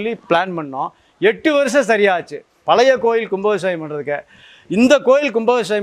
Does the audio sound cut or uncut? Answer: uncut